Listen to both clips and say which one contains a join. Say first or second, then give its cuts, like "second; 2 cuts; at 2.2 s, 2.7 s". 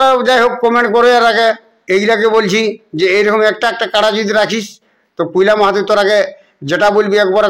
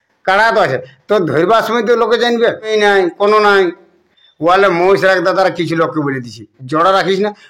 second; 1 cut; at 2.7 s